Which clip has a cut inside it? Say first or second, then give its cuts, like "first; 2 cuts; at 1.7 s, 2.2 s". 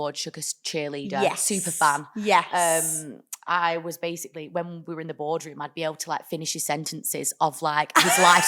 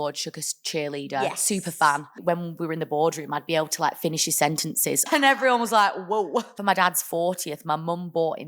second; 3 cuts; at 2.1 s, 5.1 s, 6.6 s